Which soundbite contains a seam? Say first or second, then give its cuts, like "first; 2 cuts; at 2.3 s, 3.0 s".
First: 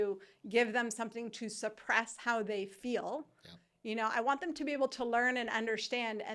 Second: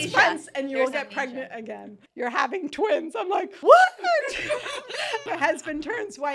second; 3 cuts; at 2.0 s, 3.5 s, 5.2 s